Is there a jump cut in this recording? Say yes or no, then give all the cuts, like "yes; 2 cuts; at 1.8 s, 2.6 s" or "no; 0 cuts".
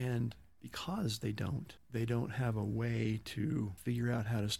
yes; 2 cuts; at 1.7 s, 3.8 s